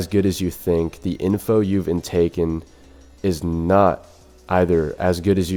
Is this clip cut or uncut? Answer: uncut